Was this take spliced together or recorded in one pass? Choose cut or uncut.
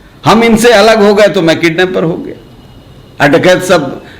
uncut